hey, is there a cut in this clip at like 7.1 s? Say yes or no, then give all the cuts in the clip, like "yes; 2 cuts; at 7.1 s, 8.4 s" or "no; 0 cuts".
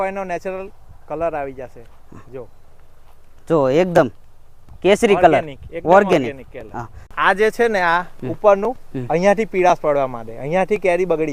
yes; 1 cut; at 7.1 s